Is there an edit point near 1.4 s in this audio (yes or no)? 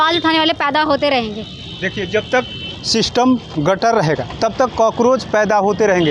no